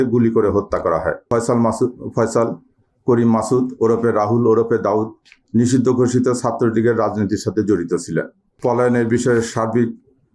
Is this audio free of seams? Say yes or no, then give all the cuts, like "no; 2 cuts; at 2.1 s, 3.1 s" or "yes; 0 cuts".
no; 2 cuts; at 1.3 s, 8.4 s